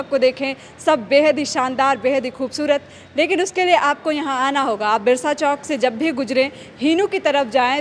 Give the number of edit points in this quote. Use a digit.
0